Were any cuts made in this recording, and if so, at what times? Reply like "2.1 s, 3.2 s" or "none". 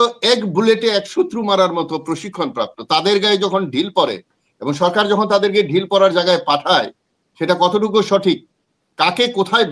none